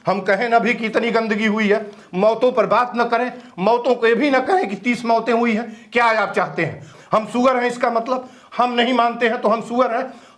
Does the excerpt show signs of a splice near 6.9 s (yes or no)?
yes